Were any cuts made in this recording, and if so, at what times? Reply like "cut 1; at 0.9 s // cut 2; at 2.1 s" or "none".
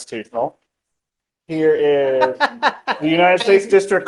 none